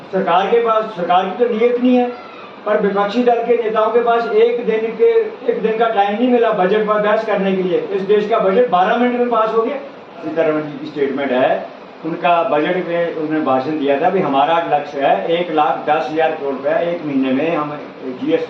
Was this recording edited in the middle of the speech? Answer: yes; 1 cut; at 10.3 s

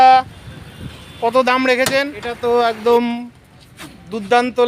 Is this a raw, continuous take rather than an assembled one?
no; 1 cut; at 2.3 s

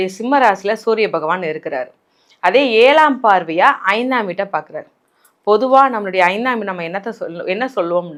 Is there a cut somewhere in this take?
no; 0 cuts

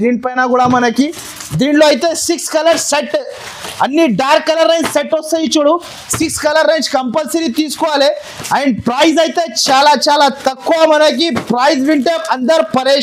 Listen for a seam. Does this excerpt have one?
no; 0 cuts

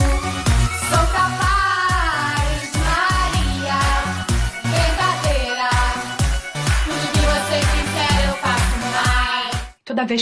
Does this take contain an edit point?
no; 0 cuts

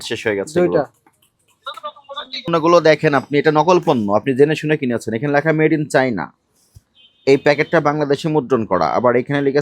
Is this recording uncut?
no; 1 cut; at 2.5 s

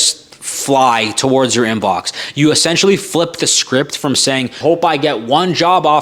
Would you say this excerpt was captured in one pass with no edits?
yes; 0 cuts

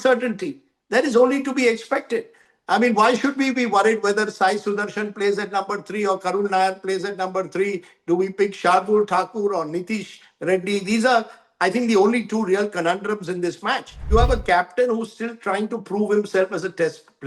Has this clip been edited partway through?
yes; 1 cut; at 14.1 s

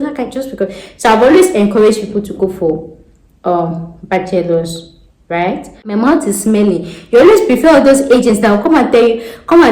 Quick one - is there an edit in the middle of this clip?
yes; 1 cut; at 5.8 s

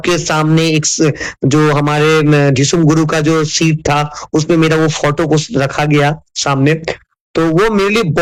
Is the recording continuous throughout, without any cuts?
yes; 0 cuts

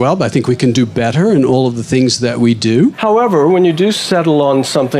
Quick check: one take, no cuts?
no; 1 cut; at 3.0 s

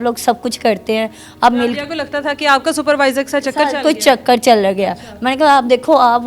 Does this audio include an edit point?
no; 0 cuts

